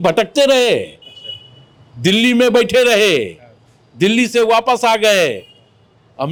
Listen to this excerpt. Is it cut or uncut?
uncut